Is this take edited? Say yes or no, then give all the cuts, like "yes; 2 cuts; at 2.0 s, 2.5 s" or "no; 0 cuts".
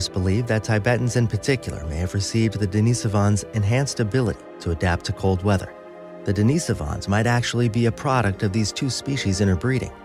no; 0 cuts